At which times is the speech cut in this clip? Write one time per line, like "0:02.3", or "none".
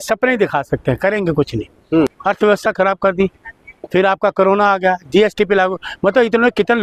0:02.2